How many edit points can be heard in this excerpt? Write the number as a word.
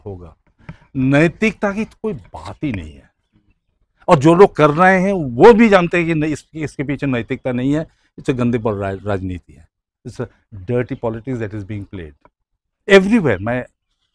zero